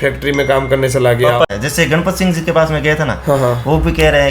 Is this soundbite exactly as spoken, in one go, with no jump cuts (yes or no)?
no